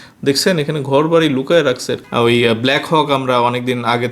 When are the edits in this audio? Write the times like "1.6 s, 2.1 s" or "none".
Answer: 2.0 s